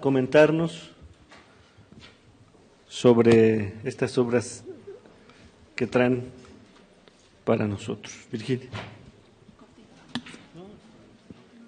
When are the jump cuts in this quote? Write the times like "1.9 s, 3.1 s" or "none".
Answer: 9.8 s